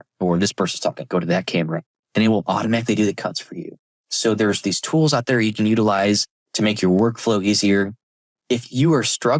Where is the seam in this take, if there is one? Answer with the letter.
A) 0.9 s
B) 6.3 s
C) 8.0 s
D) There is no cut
C